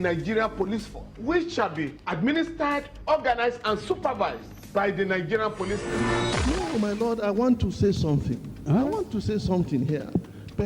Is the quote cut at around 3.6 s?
yes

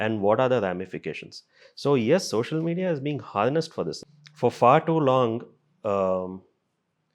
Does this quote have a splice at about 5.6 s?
no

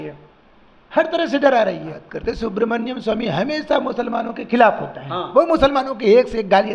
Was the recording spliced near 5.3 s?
no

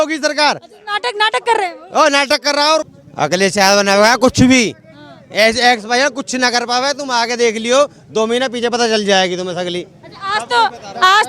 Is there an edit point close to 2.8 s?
yes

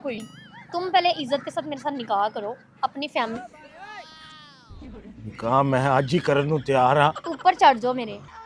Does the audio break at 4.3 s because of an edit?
no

